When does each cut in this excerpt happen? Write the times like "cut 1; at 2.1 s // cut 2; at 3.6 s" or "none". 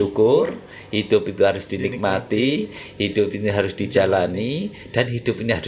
none